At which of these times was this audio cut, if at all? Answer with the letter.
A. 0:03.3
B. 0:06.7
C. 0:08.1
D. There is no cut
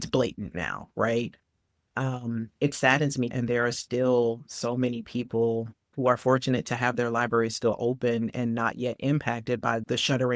A